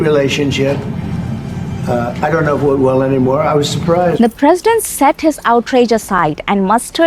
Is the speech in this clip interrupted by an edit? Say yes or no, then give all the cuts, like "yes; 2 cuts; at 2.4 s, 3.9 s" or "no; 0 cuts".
no; 0 cuts